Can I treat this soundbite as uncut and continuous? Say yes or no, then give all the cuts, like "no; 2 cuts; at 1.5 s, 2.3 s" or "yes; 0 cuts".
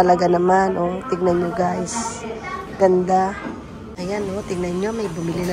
no; 1 cut; at 3.9 s